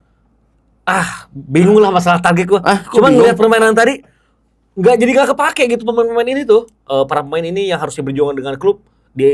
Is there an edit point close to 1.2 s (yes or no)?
no